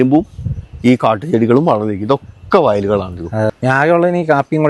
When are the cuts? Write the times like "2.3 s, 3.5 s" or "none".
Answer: 3.5 s